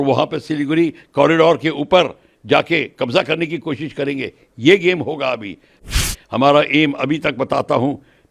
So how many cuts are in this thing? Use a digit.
1